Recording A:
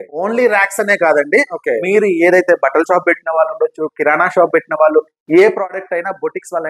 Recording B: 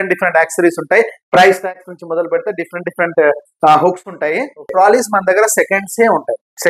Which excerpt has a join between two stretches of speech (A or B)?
B